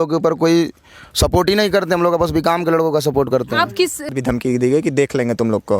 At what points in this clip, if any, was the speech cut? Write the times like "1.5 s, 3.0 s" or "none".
4.1 s